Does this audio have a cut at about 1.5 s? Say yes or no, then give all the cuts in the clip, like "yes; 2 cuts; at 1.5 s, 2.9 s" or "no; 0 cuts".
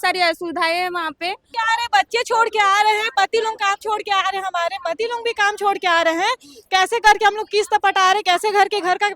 yes; 1 cut; at 1.5 s